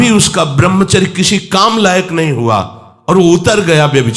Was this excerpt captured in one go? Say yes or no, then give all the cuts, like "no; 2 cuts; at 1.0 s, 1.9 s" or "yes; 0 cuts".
yes; 0 cuts